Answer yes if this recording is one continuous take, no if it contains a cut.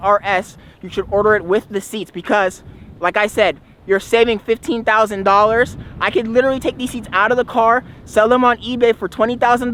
yes